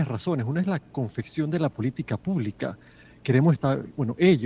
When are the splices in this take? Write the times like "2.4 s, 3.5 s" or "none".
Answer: none